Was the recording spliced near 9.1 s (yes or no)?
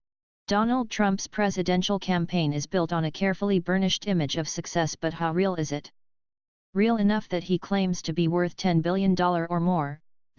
no